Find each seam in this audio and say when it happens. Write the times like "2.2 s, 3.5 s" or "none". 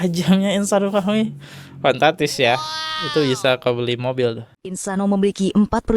4.8 s